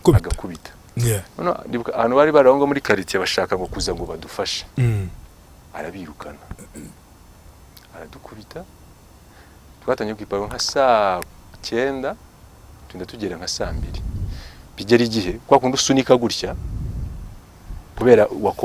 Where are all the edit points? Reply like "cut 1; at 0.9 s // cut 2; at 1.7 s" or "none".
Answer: none